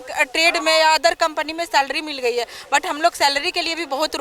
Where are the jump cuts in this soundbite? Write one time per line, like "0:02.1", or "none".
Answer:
none